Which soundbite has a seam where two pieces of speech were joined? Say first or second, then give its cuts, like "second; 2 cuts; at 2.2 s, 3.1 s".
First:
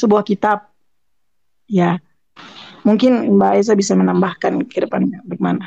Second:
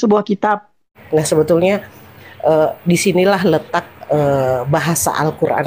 second; 1 cut; at 1.0 s